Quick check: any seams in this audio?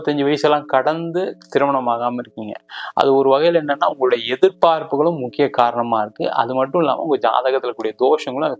no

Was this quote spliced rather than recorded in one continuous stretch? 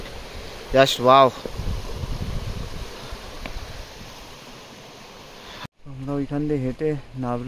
yes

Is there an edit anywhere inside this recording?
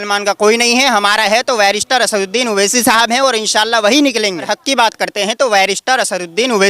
yes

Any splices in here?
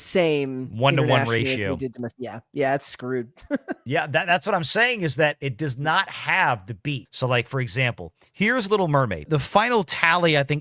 no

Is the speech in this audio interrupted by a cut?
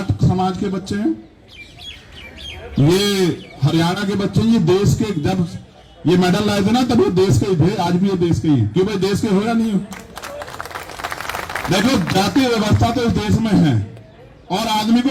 no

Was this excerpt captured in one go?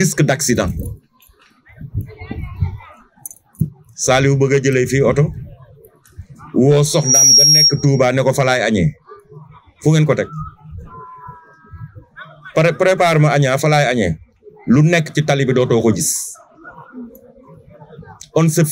yes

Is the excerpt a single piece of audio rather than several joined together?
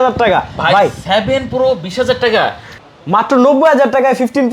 no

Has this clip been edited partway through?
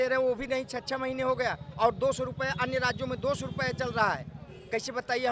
no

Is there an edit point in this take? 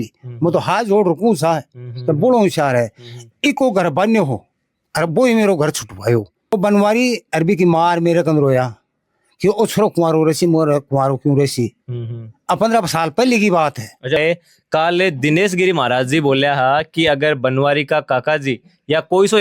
yes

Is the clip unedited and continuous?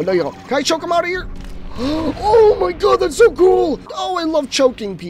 no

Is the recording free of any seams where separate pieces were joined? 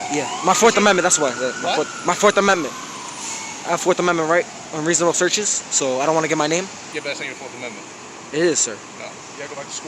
no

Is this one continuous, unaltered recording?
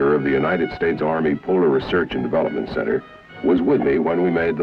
yes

